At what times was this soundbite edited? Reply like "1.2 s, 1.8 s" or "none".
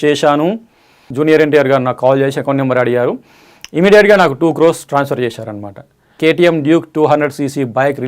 1.0 s, 6.2 s